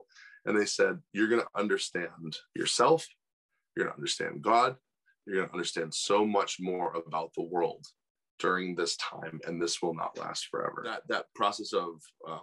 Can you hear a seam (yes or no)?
yes